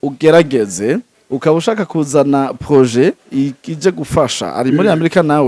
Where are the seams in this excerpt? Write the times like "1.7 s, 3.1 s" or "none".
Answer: none